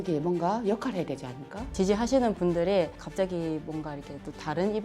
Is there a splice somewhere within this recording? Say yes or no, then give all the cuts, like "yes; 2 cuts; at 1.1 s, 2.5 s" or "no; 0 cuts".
yes; 2 cuts; at 1.7 s, 3.0 s